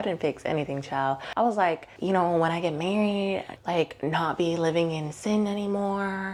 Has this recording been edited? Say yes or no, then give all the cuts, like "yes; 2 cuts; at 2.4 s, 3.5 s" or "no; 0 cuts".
no; 0 cuts